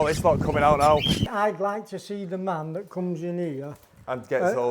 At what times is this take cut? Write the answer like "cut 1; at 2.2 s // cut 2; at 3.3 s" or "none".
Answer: cut 1; at 1.3 s